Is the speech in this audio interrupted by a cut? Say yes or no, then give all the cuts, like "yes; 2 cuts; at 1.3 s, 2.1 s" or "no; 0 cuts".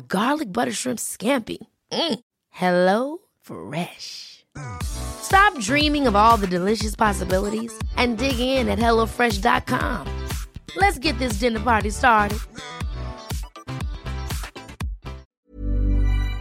yes; 1 cut; at 15.2 s